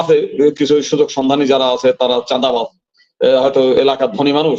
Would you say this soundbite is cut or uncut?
uncut